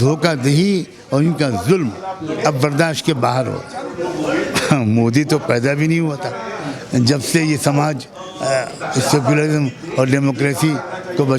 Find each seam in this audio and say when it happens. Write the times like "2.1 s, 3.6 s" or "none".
3.8 s